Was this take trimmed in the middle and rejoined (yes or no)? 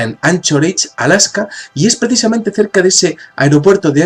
yes